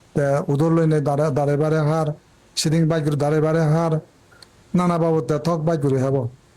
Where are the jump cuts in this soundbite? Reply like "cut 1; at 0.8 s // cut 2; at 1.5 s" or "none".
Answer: cut 1; at 5.4 s